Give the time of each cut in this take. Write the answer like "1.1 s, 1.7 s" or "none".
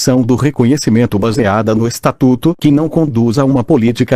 none

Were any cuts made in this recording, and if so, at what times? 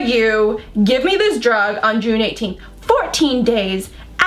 none

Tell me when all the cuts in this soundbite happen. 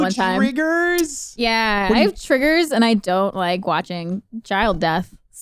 none

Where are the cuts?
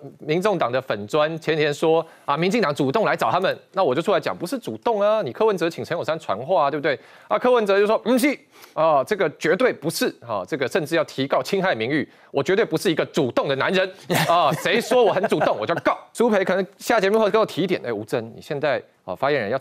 16.0 s

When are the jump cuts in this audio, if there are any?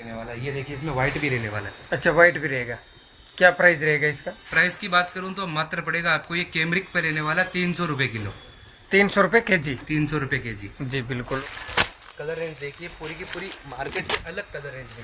11.4 s

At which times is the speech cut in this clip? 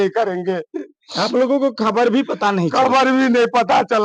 none

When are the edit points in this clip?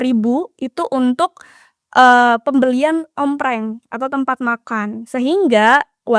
none

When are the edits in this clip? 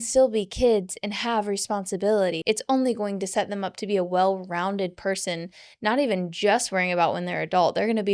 2.4 s

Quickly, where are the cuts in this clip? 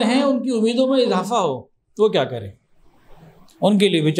none

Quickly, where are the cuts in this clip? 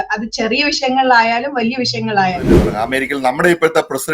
2.6 s

